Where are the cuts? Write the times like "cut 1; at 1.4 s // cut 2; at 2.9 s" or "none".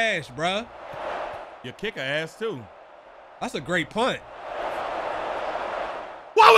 none